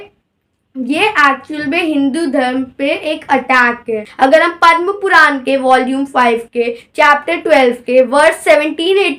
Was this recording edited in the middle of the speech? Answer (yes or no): yes